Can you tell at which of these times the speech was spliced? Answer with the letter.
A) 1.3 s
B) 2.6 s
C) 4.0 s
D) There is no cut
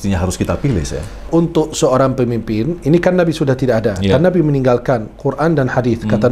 A